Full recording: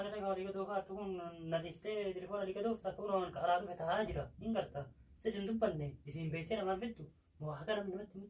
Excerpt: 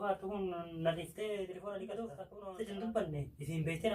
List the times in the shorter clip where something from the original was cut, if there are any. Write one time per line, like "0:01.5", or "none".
0:02.3